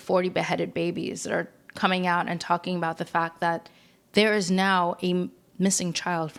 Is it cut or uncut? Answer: uncut